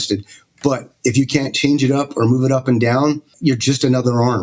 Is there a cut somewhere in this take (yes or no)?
yes